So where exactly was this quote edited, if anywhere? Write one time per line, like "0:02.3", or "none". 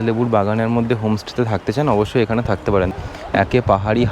0:02.9